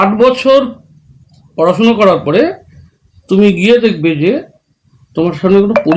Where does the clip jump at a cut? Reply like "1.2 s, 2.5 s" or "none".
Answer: none